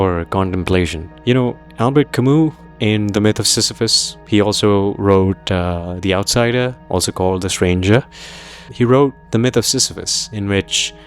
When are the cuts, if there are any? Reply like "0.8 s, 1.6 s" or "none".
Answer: 8.6 s